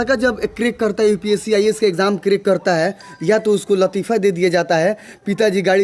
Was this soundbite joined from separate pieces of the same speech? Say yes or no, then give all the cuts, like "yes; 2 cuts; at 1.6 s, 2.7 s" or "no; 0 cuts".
no; 0 cuts